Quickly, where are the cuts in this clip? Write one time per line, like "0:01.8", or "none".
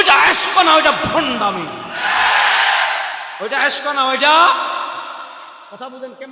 none